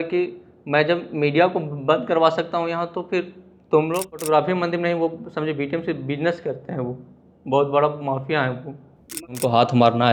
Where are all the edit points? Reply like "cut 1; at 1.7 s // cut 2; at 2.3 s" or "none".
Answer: cut 1; at 4.2 s // cut 2; at 9.4 s